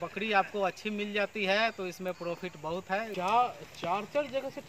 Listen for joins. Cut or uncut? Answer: cut